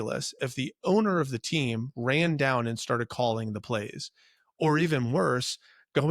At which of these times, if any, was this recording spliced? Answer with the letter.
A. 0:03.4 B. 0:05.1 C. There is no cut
C